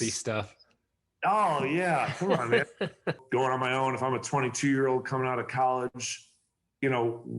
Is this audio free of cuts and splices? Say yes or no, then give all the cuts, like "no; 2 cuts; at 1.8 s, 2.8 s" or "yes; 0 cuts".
no; 1 cut; at 3.2 s